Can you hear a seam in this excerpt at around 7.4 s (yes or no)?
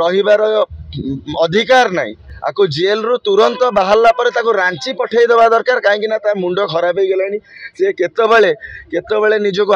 no